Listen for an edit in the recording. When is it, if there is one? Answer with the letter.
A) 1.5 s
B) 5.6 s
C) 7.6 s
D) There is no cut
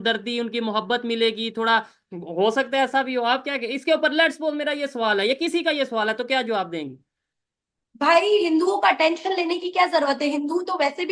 D